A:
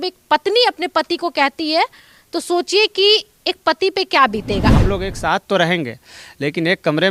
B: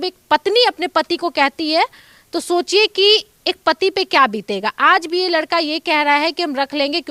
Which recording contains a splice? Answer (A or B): A